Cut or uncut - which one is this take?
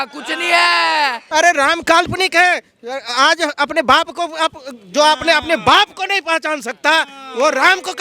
cut